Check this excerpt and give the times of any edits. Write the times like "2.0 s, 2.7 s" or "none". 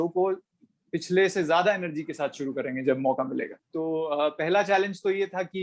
3.6 s